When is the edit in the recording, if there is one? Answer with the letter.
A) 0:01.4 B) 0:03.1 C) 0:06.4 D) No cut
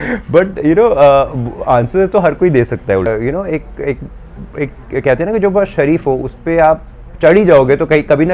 B